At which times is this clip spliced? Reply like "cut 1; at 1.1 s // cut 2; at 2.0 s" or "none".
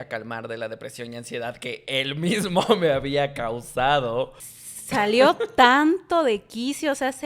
cut 1; at 4.5 s